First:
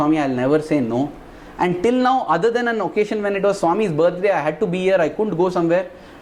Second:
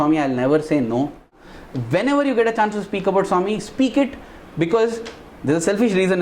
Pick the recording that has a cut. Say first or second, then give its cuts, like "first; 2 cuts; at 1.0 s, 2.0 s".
second; 1 cut; at 1.4 s